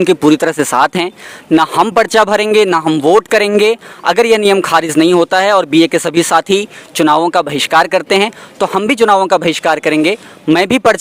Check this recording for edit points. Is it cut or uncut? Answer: uncut